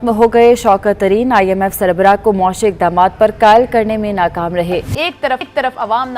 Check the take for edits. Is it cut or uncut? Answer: cut